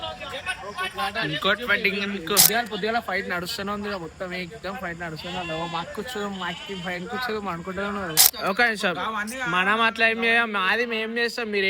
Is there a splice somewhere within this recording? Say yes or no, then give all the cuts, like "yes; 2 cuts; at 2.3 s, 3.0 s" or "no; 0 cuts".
yes; 2 cuts; at 2.4 s, 8.3 s